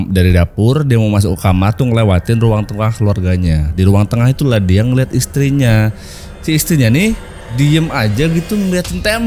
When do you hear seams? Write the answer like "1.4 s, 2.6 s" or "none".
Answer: none